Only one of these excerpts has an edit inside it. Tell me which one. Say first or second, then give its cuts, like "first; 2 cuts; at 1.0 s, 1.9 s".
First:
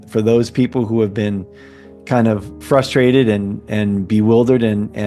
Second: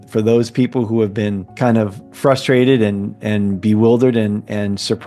second; 1 cut; at 2.0 s